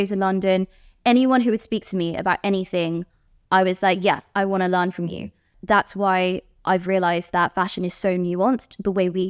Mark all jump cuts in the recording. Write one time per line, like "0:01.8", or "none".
0:05.5

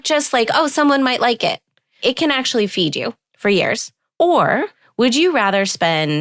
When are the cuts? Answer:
0:02.0
0:03.2
0:04.0
0:04.8

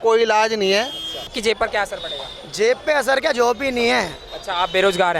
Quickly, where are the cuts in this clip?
0:01.3

